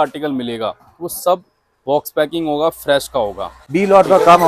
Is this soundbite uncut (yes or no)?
yes